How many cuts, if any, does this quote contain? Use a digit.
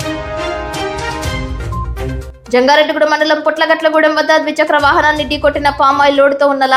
0